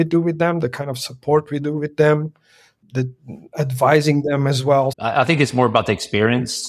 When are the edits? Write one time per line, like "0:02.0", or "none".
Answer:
0:02.8
0:05.0